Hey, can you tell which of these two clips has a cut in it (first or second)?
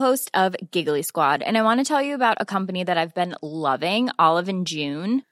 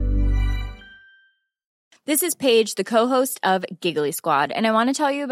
second